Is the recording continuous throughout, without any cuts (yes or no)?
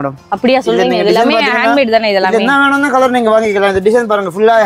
yes